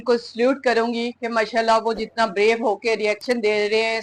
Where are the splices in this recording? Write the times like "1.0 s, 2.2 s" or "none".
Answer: none

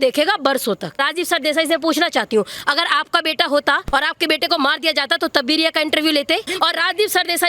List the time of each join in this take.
1.1 s, 6.5 s

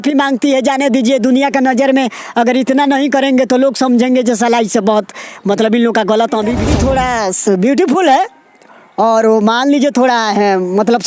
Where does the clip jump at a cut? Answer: 6.7 s

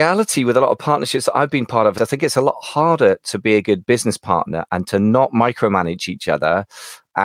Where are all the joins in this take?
1.9 s

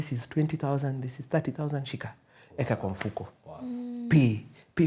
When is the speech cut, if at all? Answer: none

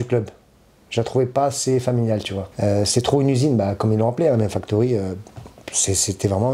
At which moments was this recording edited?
2.4 s

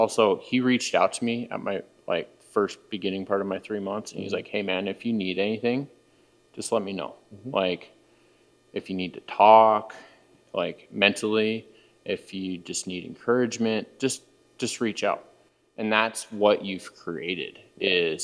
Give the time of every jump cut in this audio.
none

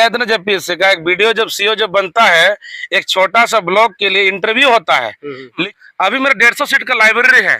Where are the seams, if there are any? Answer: 5.7 s

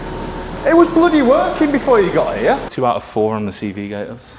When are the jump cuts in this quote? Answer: 2.7 s

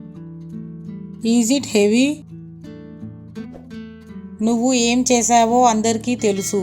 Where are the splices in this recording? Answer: 1.2 s, 2.2 s, 3.6 s

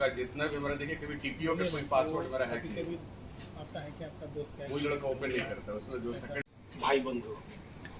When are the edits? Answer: 6.6 s

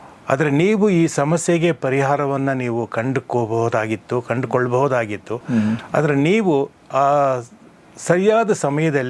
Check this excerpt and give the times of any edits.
none

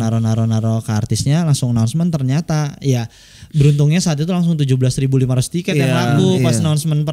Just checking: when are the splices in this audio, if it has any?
none

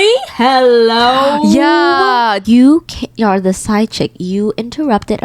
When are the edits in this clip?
2.4 s

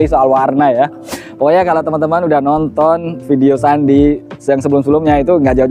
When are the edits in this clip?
1.2 s

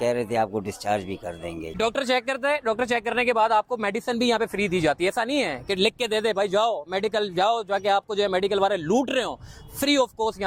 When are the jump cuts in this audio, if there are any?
1.8 s

